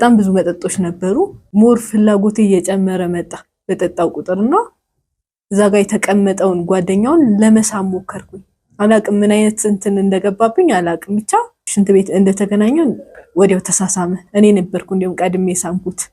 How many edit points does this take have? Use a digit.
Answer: 2